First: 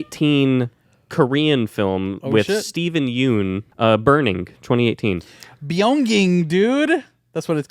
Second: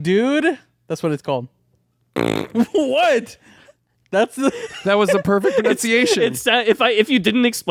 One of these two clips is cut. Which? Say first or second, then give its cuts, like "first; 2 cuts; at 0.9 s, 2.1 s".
first; 1 cut; at 3.7 s